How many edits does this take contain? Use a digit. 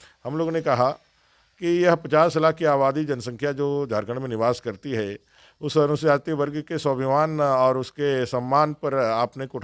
0